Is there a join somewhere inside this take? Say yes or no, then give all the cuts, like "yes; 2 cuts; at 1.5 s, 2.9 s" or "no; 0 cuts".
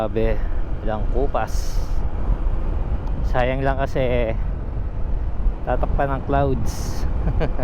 no; 0 cuts